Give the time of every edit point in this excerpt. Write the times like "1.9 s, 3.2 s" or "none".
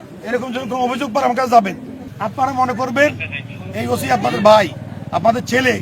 2.1 s